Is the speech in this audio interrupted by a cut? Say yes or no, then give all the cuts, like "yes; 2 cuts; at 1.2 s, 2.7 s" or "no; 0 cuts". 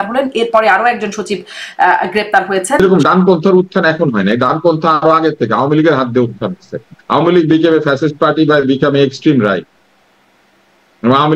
yes; 1 cut; at 2.8 s